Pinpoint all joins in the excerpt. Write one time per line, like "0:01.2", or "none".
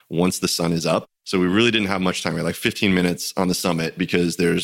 0:01.2